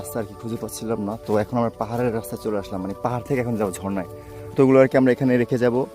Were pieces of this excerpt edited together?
yes; 1 cut; at 4.5 s

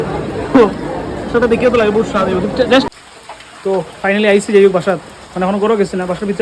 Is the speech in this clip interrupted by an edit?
yes; 1 cut; at 2.9 s

